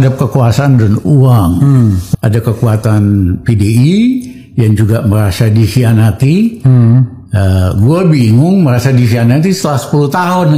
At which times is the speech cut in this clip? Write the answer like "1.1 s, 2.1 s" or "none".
2.1 s